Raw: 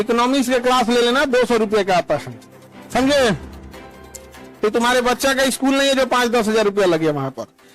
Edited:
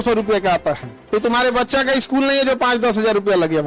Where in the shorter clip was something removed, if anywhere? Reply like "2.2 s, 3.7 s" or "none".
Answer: 0.9 s